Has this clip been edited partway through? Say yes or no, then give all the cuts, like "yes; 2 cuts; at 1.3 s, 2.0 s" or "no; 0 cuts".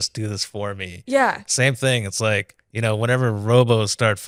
no; 0 cuts